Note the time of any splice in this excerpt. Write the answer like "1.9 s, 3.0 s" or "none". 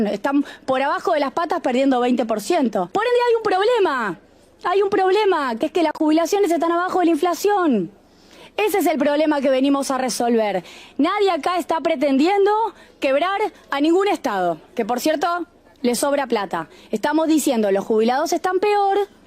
2.9 s